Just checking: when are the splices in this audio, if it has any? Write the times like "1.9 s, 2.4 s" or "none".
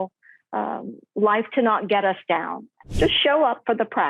2.8 s

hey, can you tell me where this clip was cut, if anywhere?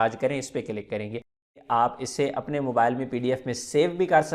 1.5 s

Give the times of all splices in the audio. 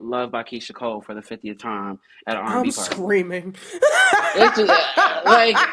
none

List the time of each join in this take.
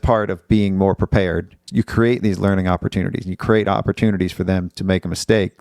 1.6 s

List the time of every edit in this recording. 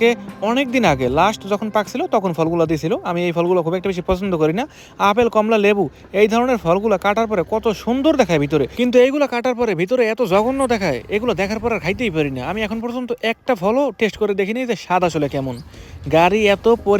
none

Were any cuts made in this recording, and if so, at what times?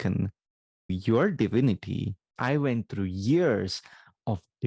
0.9 s, 2.3 s

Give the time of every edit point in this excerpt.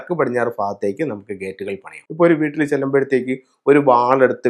2.0 s

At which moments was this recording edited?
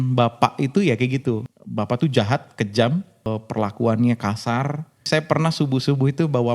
1.5 s, 3.3 s, 5.1 s

